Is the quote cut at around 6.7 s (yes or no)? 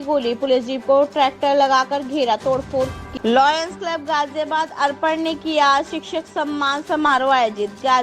no